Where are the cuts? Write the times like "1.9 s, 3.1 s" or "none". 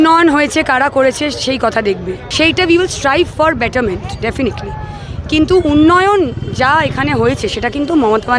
2.2 s